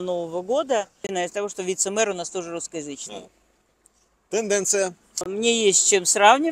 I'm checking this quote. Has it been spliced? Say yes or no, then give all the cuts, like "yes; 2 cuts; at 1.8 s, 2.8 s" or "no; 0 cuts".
yes; 2 cuts; at 1.0 s, 5.3 s